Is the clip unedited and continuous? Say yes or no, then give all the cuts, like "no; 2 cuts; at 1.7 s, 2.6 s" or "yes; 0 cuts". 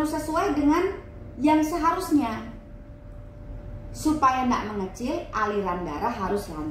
yes; 0 cuts